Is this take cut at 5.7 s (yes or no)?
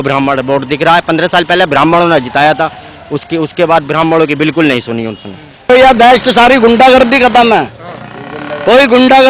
yes